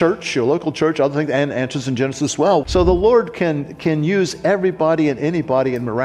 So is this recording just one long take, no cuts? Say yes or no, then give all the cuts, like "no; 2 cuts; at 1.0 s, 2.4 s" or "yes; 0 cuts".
no; 1 cut; at 2.6 s